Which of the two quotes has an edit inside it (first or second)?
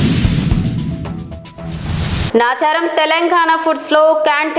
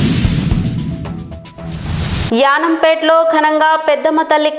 first